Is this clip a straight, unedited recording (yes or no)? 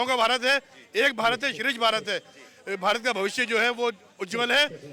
yes